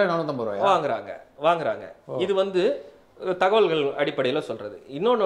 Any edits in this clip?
no; 0 cuts

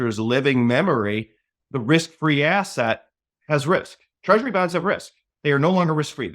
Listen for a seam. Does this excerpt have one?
yes; 2 cuts; at 1.5 s, 5.2 s

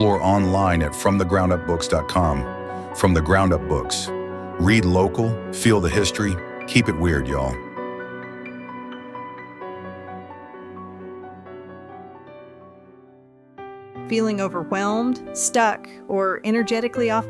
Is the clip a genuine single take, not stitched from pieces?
no; 1 cut; at 12.2 s

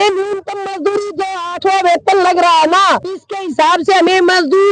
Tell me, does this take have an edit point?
no; 0 cuts

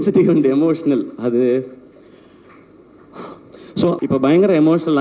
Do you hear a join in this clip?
yes; 1 cut; at 4.0 s

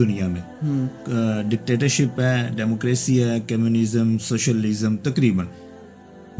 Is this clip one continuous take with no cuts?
yes; 0 cuts

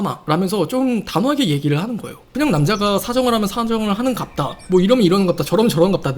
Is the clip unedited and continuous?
yes; 0 cuts

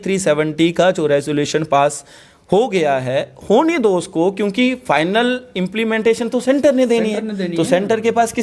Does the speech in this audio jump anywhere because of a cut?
no; 0 cuts

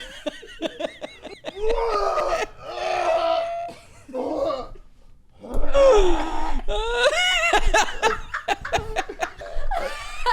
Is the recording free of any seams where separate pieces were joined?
no; 2 cuts; at 1.5 s, 9.4 s

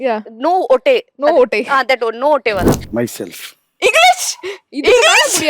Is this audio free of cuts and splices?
no; 1 cut; at 2.8 s

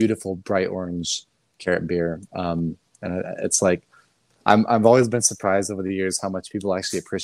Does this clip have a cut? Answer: no; 0 cuts

